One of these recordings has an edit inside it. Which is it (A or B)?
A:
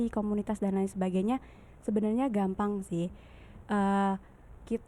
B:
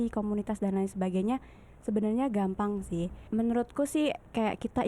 B